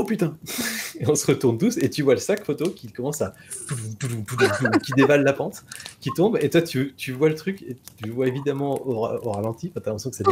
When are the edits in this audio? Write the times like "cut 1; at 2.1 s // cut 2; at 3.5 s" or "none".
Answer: none